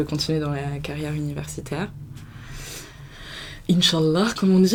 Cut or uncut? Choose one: uncut